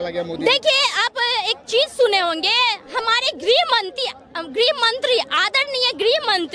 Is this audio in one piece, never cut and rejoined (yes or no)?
yes